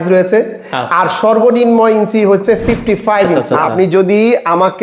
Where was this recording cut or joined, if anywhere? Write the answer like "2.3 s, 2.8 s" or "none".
3.4 s